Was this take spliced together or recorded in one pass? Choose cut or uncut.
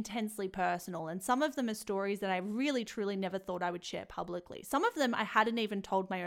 uncut